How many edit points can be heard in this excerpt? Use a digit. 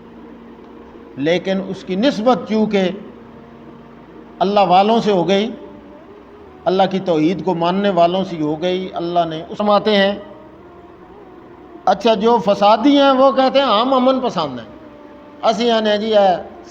1